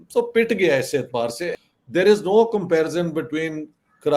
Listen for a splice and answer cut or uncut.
cut